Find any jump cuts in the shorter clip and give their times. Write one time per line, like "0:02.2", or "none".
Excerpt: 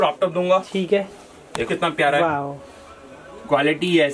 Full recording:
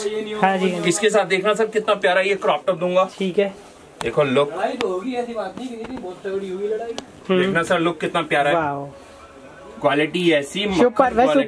0:01.6